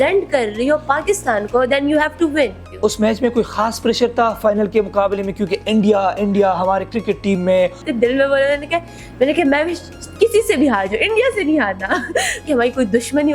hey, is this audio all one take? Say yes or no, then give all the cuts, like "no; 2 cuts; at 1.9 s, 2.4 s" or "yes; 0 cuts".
no; 3 cuts; at 2.7 s, 7.8 s, 12.5 s